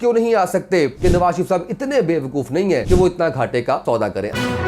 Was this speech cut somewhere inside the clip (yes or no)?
yes